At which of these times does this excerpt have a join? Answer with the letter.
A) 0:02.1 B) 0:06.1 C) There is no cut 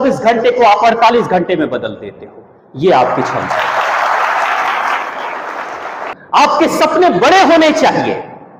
B